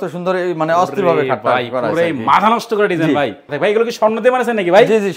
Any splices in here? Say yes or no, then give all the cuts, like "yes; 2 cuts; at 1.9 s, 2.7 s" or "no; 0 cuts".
yes; 1 cut; at 3.5 s